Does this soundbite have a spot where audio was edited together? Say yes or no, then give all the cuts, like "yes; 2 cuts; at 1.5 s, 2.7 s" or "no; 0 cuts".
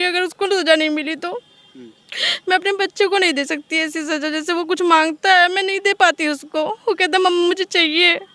no; 0 cuts